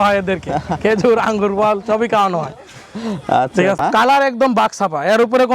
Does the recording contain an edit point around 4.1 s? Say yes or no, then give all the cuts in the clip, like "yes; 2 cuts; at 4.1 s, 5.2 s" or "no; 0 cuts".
yes; 1 cut; at 4.1 s